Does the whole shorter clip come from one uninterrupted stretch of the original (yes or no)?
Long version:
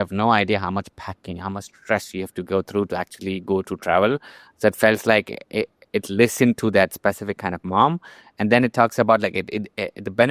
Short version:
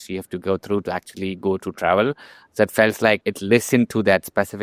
no